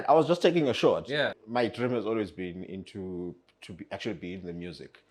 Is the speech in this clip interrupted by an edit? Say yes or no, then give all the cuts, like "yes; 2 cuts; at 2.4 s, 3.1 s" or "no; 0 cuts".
yes; 1 cut; at 1.3 s